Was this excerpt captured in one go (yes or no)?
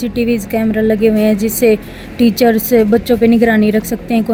yes